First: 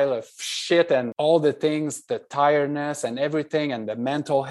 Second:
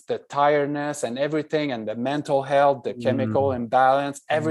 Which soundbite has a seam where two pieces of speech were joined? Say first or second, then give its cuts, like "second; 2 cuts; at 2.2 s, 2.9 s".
first; 1 cut; at 1.1 s